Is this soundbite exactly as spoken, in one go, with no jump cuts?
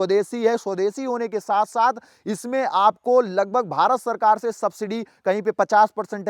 yes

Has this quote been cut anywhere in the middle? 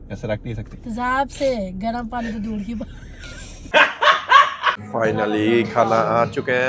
yes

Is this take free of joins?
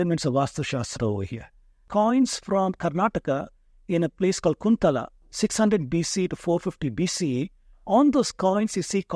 no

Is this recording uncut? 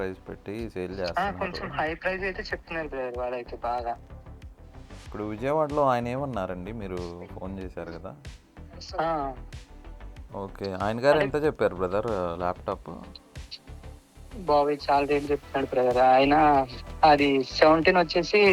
no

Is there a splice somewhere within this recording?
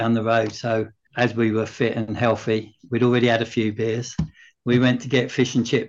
yes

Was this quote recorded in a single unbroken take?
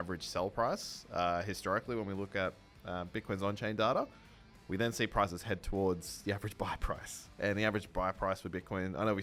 yes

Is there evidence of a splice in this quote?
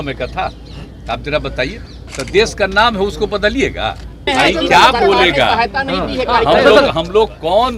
yes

